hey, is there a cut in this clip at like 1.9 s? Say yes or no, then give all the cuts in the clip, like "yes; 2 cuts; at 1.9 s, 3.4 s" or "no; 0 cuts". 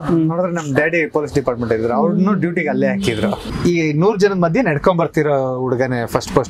no; 1 cut; at 3.5 s